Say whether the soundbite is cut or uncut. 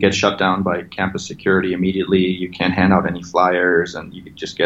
uncut